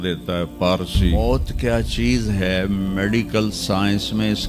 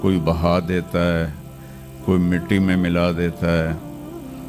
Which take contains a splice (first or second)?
first